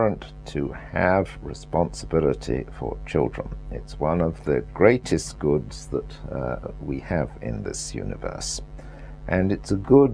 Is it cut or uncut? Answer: cut